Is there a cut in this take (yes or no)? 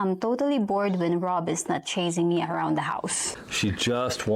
yes